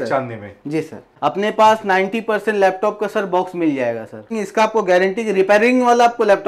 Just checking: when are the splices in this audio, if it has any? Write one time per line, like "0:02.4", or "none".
0:01.0
0:04.3